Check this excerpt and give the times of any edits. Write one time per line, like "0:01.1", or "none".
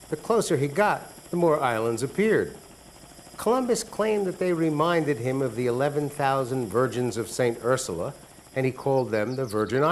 none